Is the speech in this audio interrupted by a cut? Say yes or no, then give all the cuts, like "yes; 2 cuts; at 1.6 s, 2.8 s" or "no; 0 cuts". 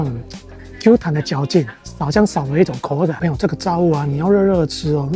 yes; 1 cut; at 3.2 s